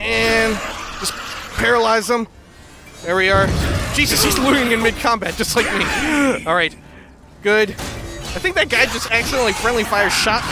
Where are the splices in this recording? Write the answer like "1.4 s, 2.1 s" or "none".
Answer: 3.6 s, 8.0 s